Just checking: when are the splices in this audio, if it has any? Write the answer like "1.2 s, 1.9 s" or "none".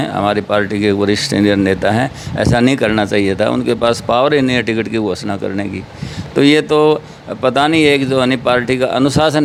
none